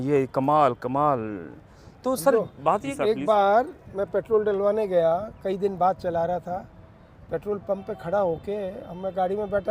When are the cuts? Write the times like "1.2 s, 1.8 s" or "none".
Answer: 2.9 s